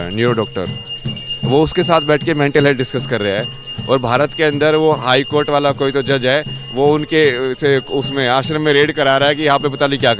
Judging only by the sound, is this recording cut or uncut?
uncut